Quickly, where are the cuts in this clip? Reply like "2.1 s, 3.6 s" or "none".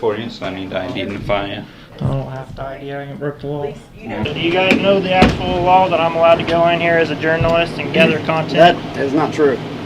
4.2 s